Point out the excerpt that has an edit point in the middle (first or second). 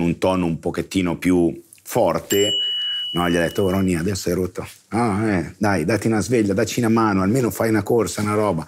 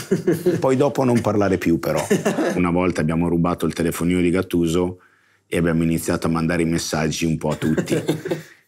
second